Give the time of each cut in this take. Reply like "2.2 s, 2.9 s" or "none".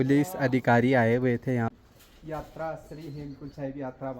1.7 s